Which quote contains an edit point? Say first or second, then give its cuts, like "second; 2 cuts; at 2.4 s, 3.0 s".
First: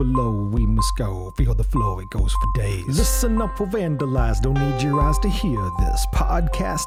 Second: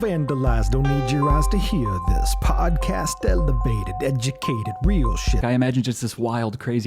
second; 1 cut; at 5.4 s